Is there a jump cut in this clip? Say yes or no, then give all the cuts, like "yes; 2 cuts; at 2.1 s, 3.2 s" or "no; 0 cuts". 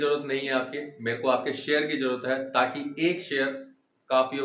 no; 0 cuts